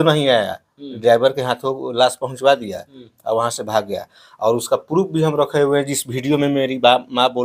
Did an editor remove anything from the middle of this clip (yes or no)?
no